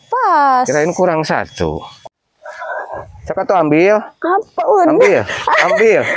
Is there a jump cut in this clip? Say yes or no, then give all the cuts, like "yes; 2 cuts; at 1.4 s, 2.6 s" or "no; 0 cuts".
yes; 1 cut; at 1.9 s